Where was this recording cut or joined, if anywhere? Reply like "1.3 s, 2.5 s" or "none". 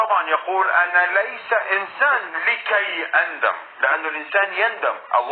none